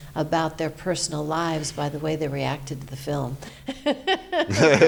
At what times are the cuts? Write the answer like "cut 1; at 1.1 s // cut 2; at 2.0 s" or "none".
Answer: none